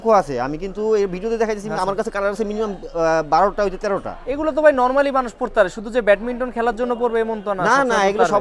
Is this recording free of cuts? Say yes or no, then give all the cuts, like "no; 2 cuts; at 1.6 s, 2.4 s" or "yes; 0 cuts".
yes; 0 cuts